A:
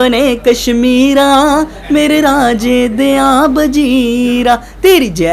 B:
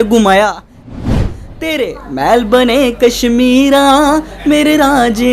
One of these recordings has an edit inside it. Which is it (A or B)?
B